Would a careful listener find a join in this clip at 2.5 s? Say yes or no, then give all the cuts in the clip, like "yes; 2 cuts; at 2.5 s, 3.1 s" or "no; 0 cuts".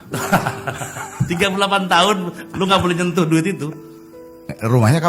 no; 0 cuts